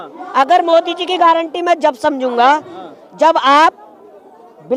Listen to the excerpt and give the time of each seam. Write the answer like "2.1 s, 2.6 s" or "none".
none